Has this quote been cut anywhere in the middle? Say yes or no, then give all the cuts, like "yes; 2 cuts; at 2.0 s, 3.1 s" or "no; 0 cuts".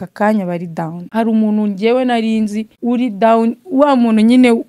yes; 2 cuts; at 1.0 s, 2.7 s